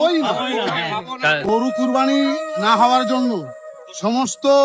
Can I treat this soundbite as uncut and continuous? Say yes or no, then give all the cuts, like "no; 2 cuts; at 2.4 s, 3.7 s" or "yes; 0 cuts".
yes; 0 cuts